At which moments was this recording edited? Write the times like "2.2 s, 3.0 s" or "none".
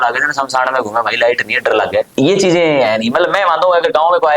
2.1 s